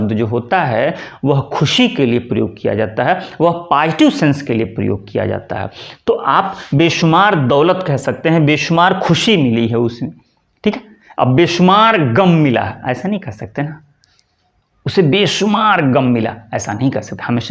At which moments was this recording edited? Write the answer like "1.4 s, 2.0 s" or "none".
none